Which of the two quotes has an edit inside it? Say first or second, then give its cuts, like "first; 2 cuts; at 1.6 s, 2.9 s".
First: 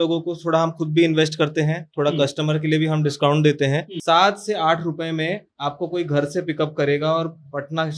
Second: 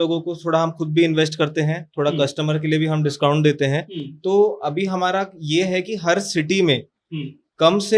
first; 1 cut; at 3.9 s